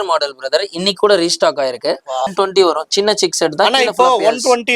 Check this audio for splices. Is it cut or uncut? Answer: cut